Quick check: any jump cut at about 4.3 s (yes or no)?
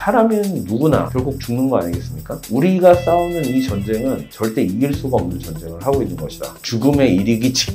no